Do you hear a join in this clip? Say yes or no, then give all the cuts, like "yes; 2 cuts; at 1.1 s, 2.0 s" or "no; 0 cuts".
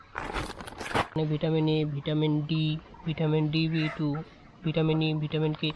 yes; 1 cut; at 1.2 s